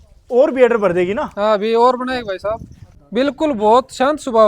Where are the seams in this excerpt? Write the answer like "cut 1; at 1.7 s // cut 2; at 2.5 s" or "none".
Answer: cut 1; at 2.8 s